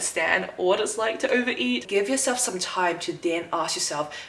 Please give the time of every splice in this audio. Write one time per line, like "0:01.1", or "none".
0:01.9